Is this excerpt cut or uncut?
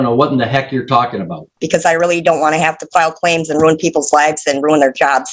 cut